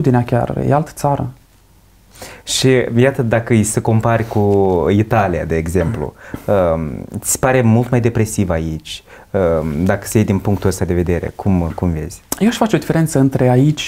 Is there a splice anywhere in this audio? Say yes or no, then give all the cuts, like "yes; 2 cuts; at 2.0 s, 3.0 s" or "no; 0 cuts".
no; 0 cuts